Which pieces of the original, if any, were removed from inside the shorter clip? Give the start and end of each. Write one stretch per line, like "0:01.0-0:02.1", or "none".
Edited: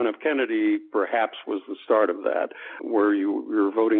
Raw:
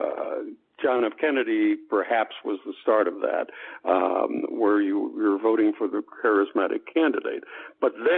0:03.8-0:04.5